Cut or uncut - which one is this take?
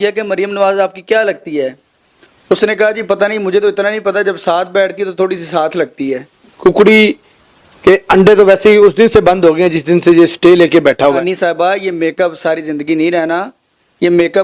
cut